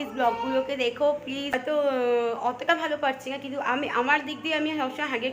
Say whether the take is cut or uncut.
cut